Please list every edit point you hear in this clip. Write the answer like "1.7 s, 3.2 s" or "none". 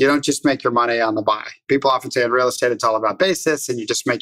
none

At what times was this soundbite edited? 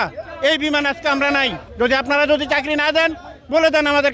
1.6 s

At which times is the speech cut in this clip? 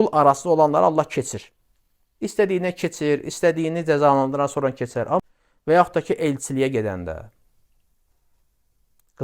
5.2 s

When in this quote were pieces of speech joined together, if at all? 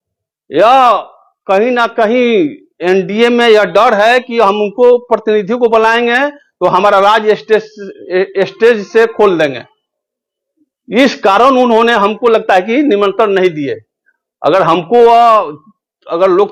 none

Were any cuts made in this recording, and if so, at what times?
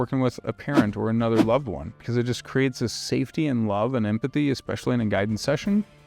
2.0 s

